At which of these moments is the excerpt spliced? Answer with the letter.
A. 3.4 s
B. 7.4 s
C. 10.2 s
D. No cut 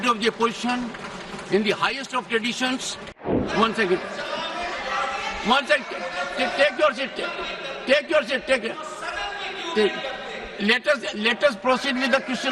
A